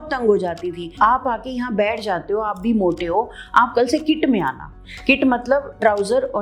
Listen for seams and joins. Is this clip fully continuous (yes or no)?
no